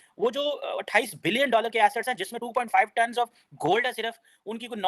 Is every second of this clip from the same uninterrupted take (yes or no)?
yes